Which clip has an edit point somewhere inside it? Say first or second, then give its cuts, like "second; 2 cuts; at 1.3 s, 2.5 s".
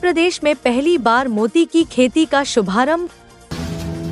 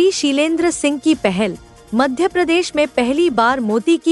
first; 1 cut; at 3.1 s